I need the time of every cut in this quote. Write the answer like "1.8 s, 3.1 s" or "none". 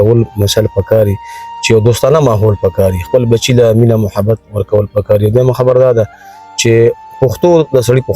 none